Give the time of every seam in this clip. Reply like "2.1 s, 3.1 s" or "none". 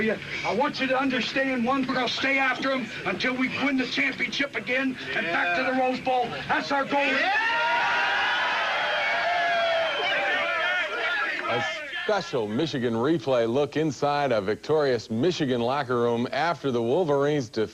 none